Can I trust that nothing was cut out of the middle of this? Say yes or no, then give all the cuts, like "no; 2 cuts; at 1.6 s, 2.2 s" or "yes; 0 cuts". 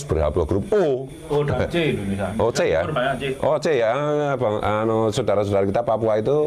yes; 0 cuts